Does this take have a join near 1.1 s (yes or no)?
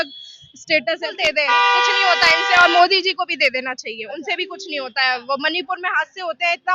yes